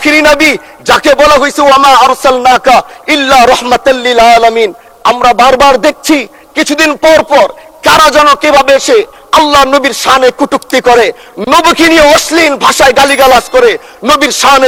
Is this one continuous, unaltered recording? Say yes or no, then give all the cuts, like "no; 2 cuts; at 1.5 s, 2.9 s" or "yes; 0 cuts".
yes; 0 cuts